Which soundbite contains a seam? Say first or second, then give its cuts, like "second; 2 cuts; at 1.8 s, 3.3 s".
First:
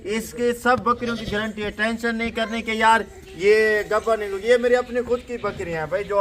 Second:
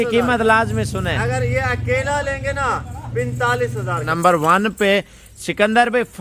second; 1 cut; at 4.1 s